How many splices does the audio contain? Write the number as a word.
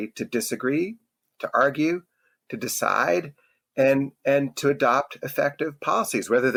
zero